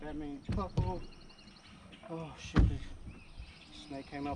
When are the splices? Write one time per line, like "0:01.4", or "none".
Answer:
none